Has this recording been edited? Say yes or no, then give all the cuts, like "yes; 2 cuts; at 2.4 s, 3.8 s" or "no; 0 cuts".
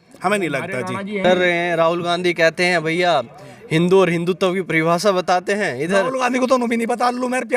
yes; 1 cut; at 1.2 s